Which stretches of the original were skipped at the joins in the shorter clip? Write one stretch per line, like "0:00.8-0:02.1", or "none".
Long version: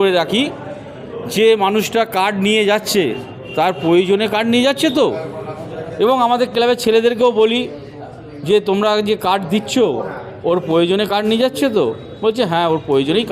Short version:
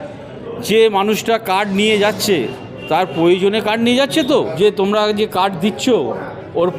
0:05.2-0:08.4